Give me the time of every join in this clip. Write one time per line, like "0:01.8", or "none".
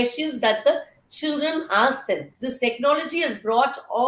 0:02.4